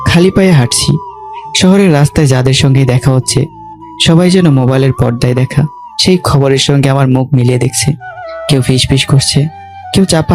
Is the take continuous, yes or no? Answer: yes